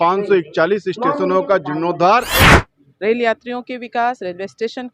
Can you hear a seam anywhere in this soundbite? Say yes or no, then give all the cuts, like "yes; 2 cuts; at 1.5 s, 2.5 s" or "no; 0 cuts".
yes; 1 cut; at 2.5 s